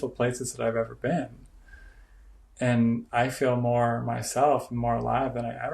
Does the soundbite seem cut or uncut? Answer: uncut